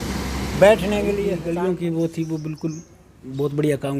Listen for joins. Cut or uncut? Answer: cut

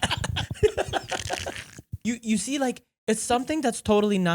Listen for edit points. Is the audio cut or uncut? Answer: cut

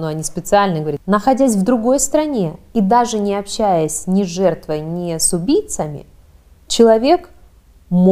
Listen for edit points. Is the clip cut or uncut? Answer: cut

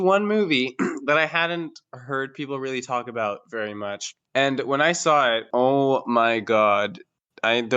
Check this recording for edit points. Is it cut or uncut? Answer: cut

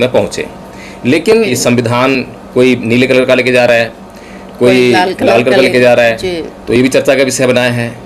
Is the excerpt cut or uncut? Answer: cut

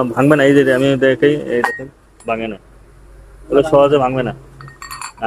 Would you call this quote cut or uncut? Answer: uncut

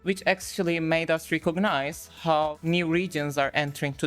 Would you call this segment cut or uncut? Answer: cut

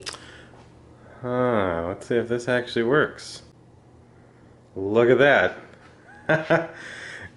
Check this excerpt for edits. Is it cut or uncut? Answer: cut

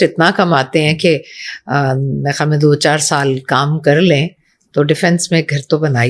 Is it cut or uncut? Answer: uncut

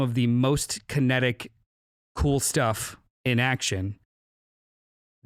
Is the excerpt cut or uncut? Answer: uncut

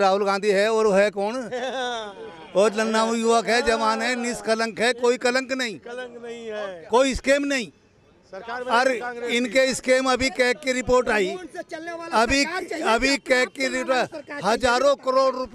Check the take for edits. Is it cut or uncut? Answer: uncut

